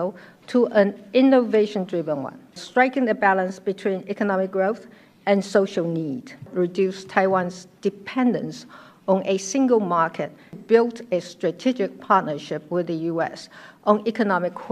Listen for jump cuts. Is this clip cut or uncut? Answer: cut